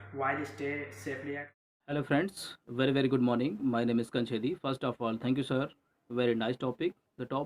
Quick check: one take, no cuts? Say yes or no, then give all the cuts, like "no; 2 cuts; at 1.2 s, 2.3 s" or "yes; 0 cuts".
no; 1 cut; at 1.5 s